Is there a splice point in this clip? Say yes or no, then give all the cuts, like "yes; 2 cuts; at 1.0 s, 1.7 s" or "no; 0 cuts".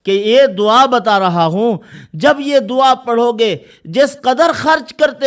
no; 0 cuts